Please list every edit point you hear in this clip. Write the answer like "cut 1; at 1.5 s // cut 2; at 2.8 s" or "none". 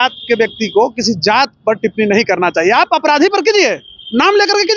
none